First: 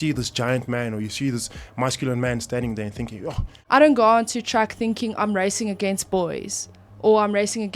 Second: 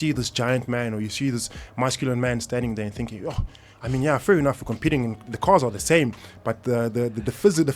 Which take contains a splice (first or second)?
first